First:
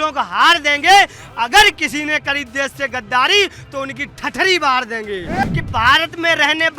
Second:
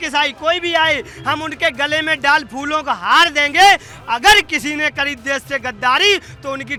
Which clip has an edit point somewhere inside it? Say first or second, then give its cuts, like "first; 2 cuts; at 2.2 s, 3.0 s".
first; 1 cut; at 5.4 s